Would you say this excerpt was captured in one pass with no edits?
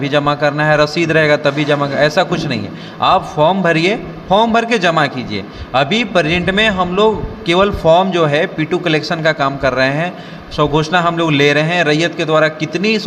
yes; 0 cuts

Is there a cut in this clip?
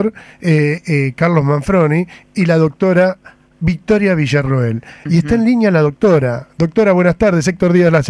yes; 1 cut; at 5.2 s

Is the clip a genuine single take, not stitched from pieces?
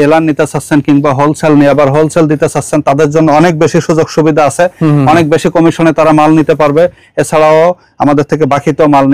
yes; 0 cuts

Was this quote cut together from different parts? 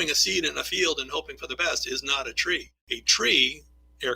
yes; 1 cut; at 2.4 s

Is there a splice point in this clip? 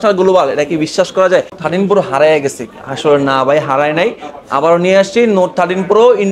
yes; 1 cut; at 1.6 s

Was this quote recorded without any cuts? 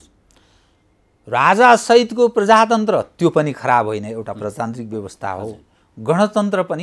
yes; 0 cuts

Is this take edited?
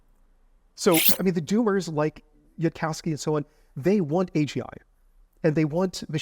yes; 1 cut; at 1.1 s

